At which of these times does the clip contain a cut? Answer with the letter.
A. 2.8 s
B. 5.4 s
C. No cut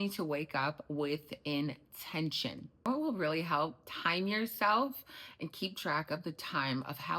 A